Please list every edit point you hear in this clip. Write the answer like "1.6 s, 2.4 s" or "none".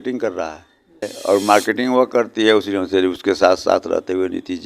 1.1 s